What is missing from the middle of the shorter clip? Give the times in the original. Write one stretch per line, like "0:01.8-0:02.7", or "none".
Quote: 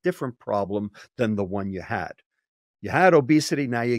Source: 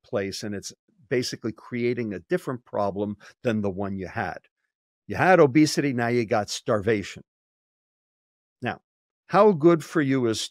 none

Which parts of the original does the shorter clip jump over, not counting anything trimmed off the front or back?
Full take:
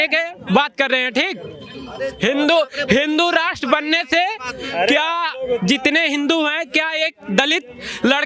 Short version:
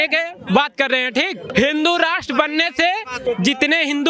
0:01.4-0:02.8
0:04.5-0:05.4

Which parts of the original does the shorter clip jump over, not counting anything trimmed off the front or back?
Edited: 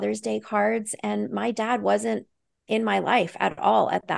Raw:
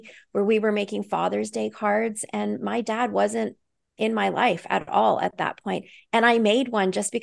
none

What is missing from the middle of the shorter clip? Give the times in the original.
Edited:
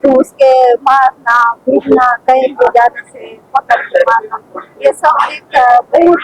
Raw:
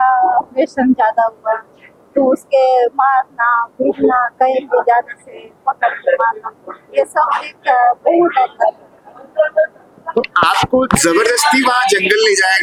none

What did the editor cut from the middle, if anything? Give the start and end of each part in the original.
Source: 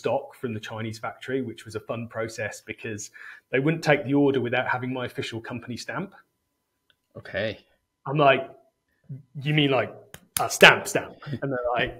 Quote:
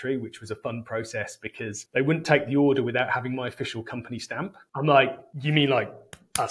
0:03.1-0:03.4
0:06.2-0:07.9
0:08.6-0:09.3

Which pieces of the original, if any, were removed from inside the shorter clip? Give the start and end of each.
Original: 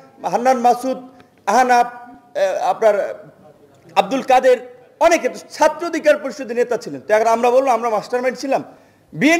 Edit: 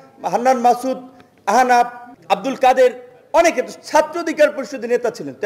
0:02.1-0:03.7

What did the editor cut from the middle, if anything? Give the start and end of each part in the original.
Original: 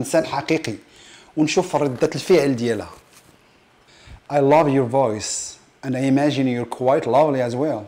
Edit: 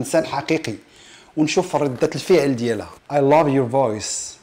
0:02.9-0:04.1

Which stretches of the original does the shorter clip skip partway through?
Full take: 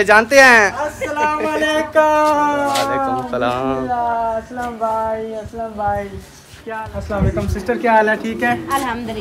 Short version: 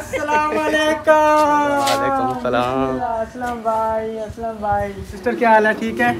0:04.0-0:04.2
0:06.3-0:07.6

